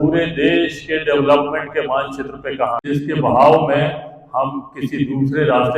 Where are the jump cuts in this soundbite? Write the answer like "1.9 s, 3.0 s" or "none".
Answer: 2.8 s